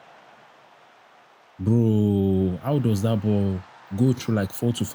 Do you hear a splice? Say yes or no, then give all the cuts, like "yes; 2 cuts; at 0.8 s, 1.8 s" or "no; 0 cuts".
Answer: yes; 1 cut; at 1.5 s